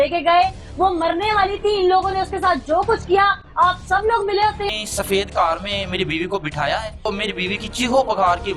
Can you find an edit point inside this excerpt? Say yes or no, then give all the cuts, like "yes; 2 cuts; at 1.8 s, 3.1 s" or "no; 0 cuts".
yes; 2 cuts; at 4.7 s, 7.1 s